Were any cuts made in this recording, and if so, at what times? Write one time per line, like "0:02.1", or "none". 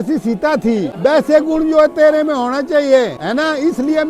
0:00.9
0:03.2